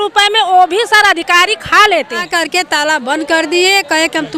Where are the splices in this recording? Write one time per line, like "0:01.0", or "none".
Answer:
0:02.3